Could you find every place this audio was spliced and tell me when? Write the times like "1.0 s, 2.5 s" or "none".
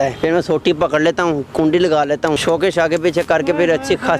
2.4 s